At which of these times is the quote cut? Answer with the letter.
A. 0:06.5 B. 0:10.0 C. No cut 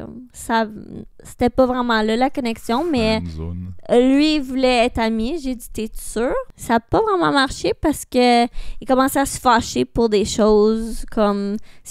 A